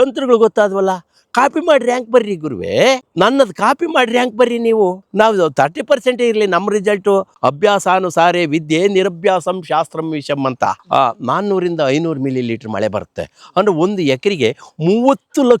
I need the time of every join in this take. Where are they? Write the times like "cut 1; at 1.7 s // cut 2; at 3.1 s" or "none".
cut 1; at 3.1 s // cut 2; at 7.3 s // cut 3; at 10.8 s